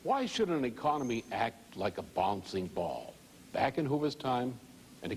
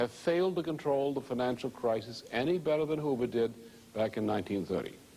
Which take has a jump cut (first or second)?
second